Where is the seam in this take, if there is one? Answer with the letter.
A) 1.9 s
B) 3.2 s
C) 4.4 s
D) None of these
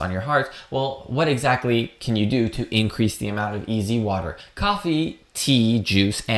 C